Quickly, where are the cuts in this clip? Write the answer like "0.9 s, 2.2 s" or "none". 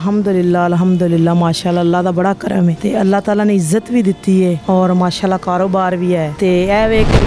2.8 s, 4.6 s, 6.3 s

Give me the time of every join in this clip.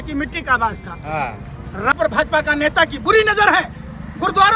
1.9 s

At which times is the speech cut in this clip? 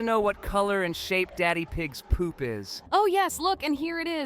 2.8 s

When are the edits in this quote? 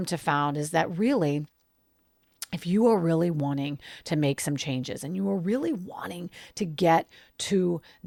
none

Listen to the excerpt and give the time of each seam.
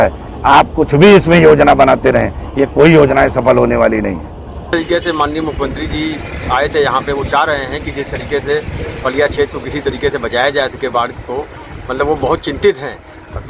4.7 s

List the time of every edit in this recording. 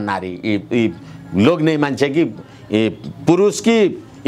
none

